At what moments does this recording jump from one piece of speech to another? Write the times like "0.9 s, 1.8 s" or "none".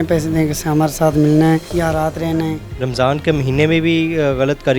1.7 s, 2.7 s